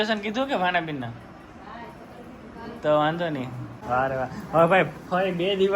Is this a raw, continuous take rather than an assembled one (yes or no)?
no